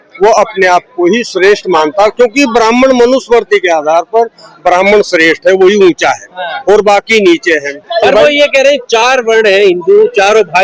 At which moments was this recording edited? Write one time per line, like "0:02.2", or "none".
0:07.8